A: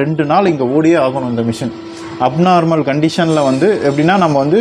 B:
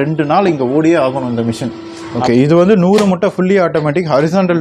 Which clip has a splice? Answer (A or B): B